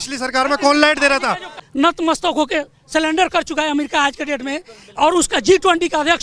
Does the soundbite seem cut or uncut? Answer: cut